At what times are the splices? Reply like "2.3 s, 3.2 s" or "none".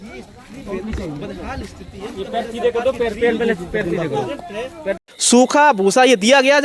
5.1 s

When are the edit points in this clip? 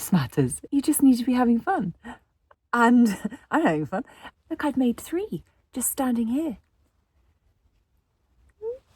4.2 s

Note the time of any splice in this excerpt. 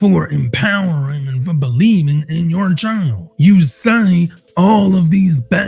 3.2 s

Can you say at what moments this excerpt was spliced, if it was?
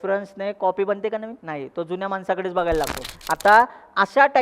1.4 s, 3.1 s

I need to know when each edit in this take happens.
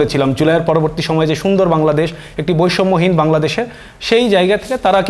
none

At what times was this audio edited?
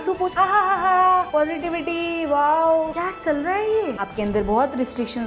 2.9 s, 3.9 s

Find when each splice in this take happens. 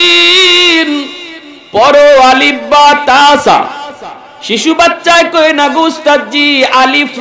none

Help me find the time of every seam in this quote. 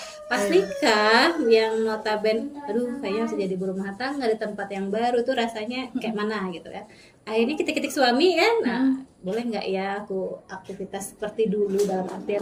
none

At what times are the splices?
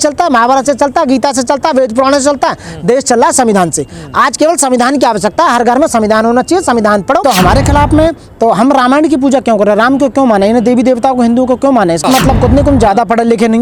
7.2 s, 12.0 s

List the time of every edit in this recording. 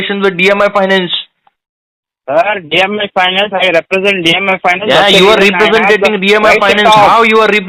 none

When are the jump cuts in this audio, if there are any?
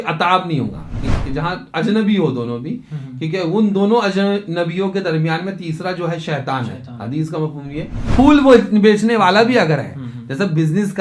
1.0 s, 8.0 s

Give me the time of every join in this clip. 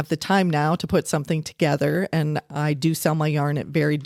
none

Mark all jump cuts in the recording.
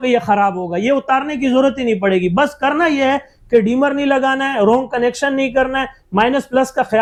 none

